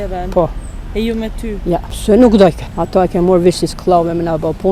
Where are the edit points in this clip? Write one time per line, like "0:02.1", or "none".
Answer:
0:01.9
0:02.7